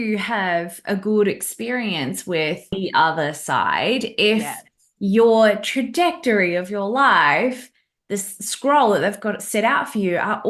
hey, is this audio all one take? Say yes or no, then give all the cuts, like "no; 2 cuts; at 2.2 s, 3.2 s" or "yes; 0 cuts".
no; 1 cut; at 2.8 s